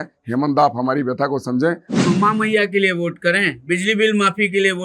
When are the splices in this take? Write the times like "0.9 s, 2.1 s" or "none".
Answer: 1.9 s